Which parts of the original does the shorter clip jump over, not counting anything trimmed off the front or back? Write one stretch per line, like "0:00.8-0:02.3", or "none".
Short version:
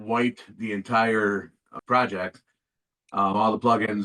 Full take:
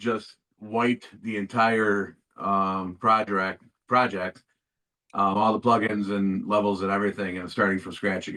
0:02.3-0:03.6